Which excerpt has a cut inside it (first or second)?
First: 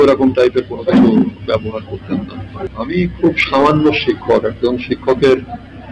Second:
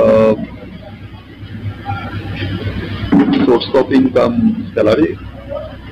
first